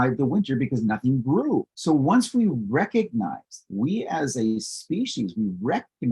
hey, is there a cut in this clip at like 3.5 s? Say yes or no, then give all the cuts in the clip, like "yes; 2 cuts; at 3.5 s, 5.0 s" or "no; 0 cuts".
no; 1 cut; at 1.7 s